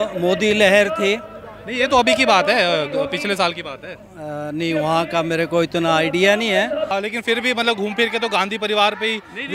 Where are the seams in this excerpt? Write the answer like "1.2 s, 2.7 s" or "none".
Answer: 6.9 s